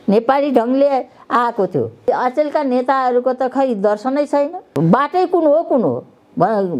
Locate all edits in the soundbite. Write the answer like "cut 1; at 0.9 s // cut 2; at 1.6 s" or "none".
cut 1; at 2.1 s // cut 2; at 4.7 s